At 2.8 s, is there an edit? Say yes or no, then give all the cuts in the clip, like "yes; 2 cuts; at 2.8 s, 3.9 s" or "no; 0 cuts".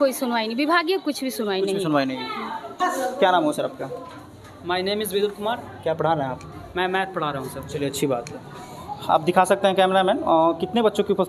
yes; 1 cut; at 2.8 s